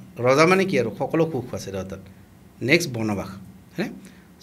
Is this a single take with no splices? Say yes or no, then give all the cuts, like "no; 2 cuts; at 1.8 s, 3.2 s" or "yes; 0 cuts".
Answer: yes; 0 cuts